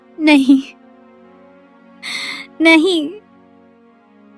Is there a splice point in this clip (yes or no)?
no